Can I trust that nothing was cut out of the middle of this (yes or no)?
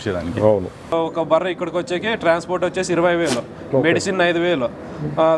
no